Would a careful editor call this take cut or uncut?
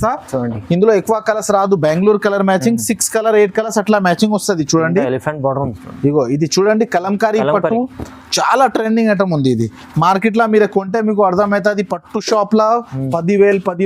uncut